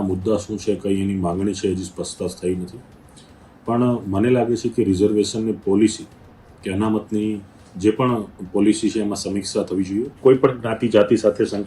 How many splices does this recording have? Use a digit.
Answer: 1